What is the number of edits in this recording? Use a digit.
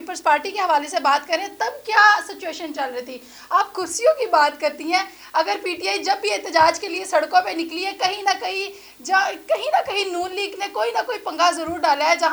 0